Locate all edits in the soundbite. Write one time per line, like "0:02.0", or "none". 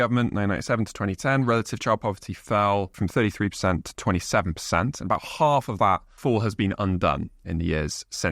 0:02.9
0:06.1